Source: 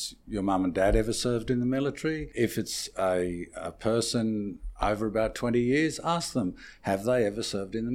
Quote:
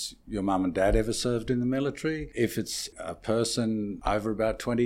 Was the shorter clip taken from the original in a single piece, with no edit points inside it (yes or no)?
no